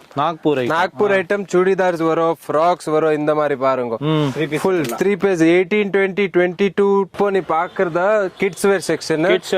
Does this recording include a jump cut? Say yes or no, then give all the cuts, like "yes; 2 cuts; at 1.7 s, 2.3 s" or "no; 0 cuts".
yes; 1 cut; at 7.1 s